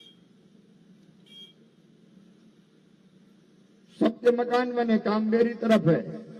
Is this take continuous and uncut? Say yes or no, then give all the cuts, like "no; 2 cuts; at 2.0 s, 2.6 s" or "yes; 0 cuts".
yes; 0 cuts